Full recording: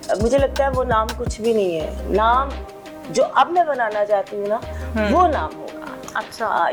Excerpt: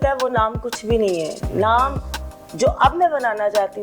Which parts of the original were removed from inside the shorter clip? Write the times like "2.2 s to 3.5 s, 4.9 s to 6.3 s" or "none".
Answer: none